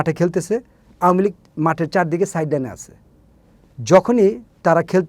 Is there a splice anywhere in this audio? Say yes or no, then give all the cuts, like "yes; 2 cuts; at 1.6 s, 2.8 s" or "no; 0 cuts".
no; 0 cuts